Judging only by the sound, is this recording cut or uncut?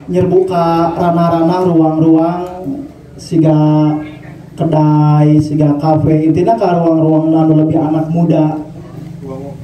uncut